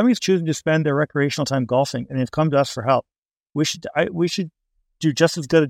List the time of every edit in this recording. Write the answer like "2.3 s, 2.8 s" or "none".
none

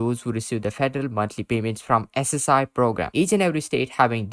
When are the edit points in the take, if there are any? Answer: 3.1 s

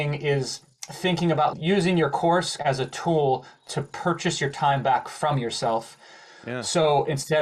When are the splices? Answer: 1.5 s, 2.6 s

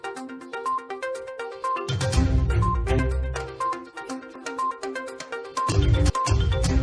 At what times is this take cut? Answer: none

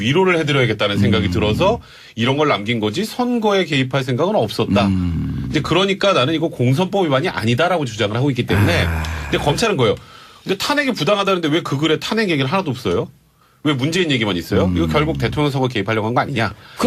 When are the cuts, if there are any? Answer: 12.8 s

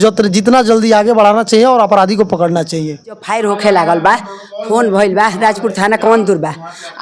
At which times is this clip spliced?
3.3 s

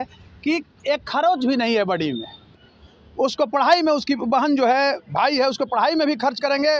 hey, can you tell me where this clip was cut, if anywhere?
2.6 s

